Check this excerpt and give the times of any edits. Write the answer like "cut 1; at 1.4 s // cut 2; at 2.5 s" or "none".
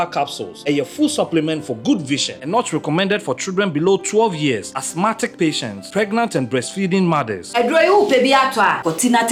none